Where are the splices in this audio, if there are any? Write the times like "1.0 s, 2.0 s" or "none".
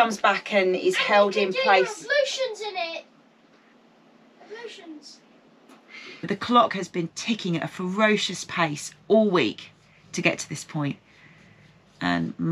6.3 s